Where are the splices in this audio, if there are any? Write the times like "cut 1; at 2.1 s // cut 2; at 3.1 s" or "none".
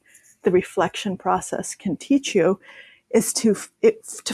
none